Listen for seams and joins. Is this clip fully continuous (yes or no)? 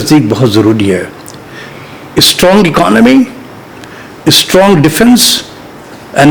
yes